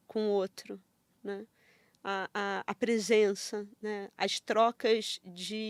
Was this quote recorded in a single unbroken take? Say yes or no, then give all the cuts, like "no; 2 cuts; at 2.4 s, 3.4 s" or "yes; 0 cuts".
yes; 0 cuts